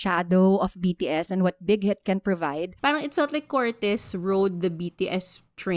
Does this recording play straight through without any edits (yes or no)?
no